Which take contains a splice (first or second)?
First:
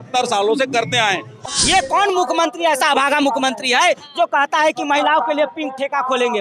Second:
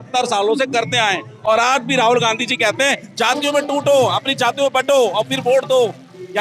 first